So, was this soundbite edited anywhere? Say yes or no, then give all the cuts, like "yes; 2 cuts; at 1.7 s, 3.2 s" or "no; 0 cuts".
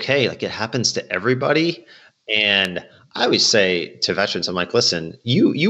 no; 0 cuts